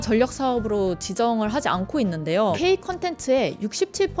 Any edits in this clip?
yes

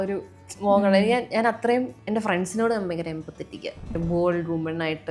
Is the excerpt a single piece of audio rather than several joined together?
no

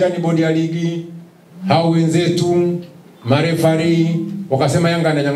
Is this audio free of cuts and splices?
yes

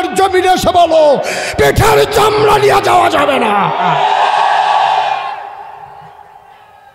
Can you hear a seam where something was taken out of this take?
no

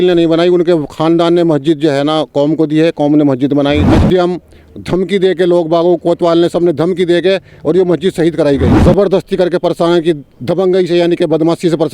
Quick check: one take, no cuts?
no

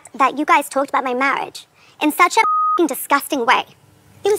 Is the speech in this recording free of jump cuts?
yes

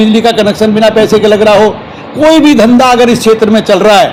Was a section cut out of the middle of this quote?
no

